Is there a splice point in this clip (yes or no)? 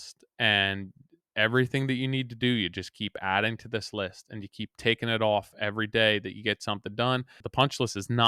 yes